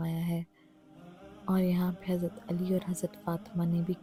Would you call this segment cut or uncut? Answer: uncut